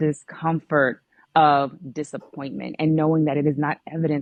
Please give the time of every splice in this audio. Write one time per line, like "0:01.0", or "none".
none